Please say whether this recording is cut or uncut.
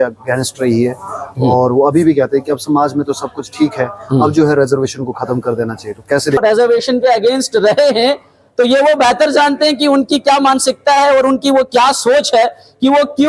cut